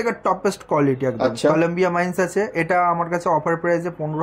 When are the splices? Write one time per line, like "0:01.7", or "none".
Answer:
none